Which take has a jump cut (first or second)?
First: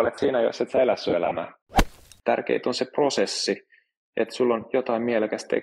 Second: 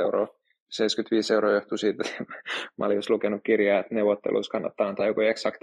first